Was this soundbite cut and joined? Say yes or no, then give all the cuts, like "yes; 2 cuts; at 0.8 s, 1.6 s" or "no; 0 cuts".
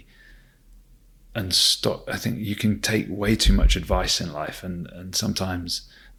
no; 0 cuts